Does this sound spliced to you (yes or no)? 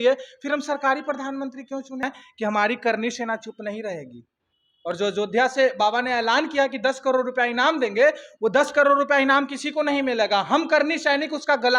yes